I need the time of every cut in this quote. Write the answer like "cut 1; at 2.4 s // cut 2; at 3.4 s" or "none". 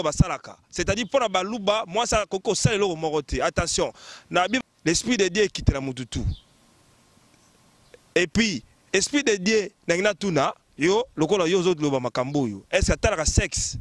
cut 1; at 4.6 s